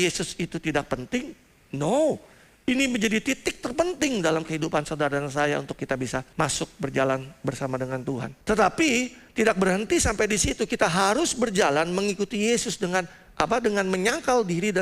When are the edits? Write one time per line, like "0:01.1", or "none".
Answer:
0:06.3
0:08.3